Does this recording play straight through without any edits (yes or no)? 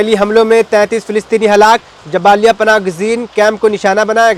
yes